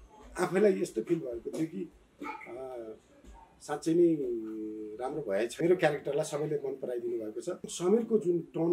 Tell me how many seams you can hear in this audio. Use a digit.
2